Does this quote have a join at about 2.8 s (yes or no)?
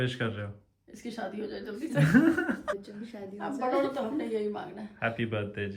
no